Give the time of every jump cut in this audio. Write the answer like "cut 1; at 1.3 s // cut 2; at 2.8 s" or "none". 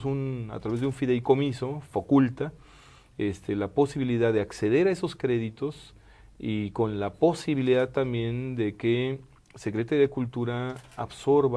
none